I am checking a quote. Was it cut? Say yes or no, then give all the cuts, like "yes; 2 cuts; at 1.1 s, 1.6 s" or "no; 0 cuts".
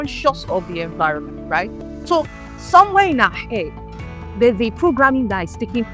no; 0 cuts